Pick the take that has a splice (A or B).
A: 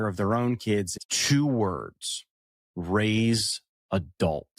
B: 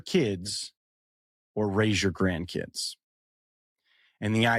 A